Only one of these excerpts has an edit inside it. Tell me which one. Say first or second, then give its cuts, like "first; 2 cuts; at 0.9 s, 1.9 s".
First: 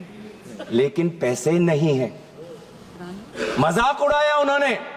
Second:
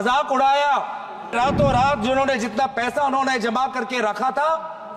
second; 1 cut; at 1.3 s